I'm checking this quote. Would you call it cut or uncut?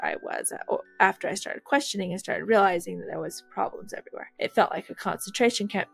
cut